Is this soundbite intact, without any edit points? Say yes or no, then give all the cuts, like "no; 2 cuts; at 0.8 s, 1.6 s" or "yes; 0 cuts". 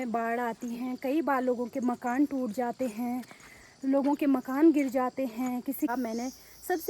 no; 1 cut; at 5.9 s